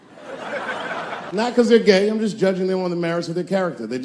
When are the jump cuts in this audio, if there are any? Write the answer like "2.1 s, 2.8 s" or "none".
1.4 s